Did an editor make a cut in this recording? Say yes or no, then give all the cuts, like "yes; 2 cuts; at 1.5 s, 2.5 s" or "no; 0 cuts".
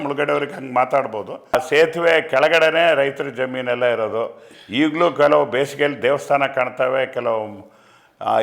yes; 1 cut; at 1.5 s